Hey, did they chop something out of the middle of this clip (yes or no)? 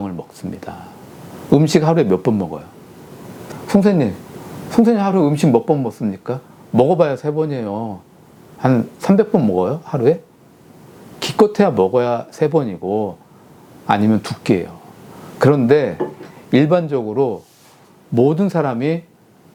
no